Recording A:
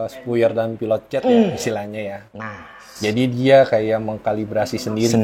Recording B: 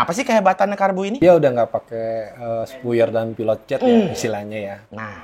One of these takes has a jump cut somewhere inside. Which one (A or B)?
B